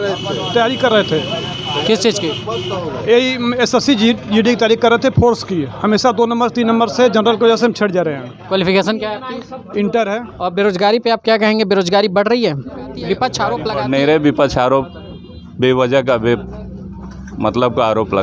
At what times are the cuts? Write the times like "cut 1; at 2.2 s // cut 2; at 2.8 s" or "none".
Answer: cut 1; at 10.3 s // cut 2; at 13.7 s